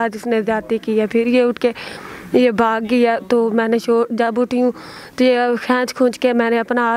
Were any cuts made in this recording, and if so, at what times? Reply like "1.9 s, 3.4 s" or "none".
none